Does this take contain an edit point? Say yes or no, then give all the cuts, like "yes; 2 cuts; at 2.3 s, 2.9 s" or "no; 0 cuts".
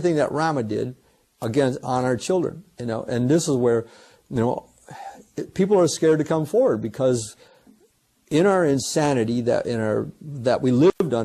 yes; 1 cut; at 8.5 s